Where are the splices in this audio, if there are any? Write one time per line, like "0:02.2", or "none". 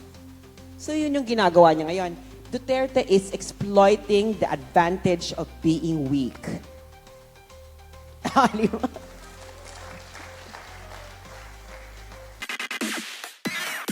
0:12.4